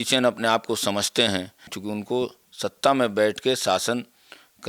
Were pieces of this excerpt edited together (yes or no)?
yes